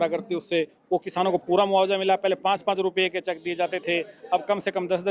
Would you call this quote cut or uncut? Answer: uncut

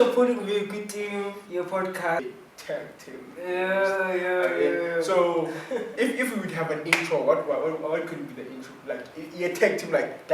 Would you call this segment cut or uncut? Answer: cut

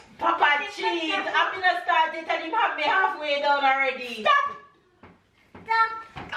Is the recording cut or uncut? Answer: uncut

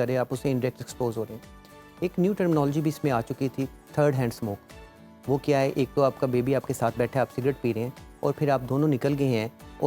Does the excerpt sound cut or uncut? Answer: uncut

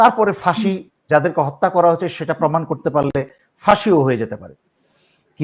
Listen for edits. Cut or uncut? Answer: uncut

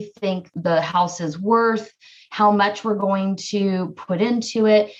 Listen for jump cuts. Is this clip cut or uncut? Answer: uncut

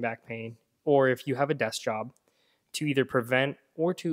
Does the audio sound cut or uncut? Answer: uncut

